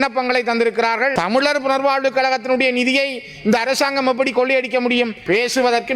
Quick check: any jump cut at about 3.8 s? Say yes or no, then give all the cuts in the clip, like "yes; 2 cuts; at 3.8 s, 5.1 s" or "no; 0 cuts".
no; 2 cuts; at 1.1 s, 5.2 s